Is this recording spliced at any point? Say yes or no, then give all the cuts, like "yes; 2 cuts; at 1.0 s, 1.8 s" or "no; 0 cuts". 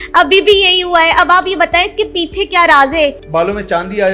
yes; 1 cut; at 3.2 s